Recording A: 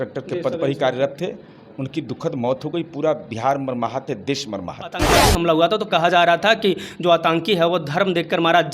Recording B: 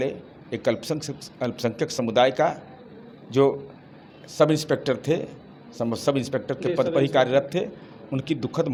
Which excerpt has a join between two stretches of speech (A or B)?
A